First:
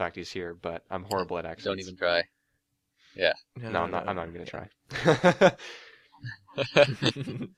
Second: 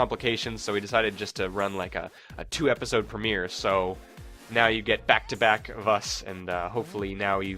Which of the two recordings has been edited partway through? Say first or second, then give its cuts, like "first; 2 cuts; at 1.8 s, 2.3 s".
second; 1 cut; at 6.4 s